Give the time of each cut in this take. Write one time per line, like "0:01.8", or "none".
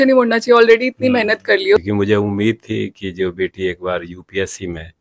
0:01.8